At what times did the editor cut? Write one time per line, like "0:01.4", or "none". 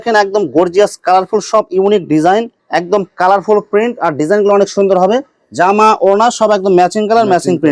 0:02.6